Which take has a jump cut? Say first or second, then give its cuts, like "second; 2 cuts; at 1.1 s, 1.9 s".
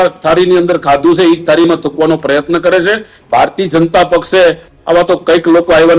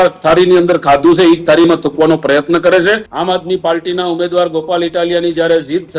second; 1 cut; at 3.1 s